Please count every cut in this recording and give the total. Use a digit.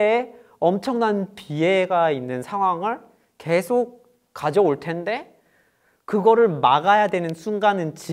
0